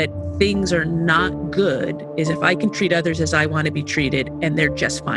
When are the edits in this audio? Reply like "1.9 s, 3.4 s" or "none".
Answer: none